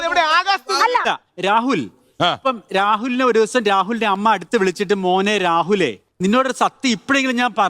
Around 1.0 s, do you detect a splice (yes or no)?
yes